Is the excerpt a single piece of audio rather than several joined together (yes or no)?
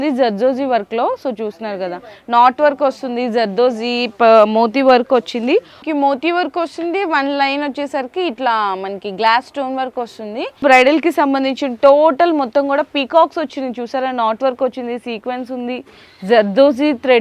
no